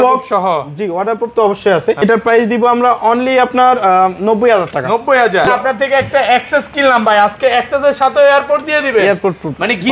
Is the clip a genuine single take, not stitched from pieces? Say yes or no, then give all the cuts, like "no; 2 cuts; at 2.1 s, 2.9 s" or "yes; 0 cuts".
no; 2 cuts; at 2.0 s, 5.5 s